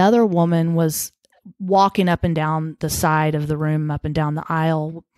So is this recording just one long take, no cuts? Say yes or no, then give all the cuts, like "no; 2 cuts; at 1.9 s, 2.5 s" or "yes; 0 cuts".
yes; 0 cuts